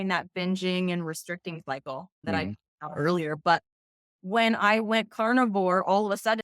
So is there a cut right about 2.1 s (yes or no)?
yes